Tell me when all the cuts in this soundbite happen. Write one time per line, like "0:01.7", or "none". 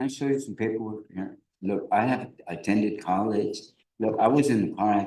none